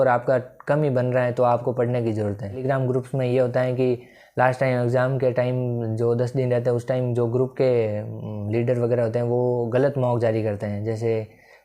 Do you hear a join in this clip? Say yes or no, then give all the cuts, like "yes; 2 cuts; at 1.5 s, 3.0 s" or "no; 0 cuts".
yes; 1 cut; at 2.6 s